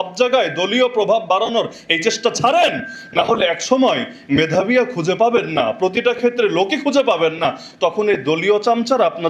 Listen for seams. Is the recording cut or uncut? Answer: uncut